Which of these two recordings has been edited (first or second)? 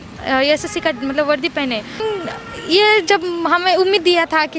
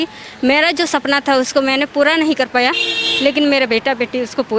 first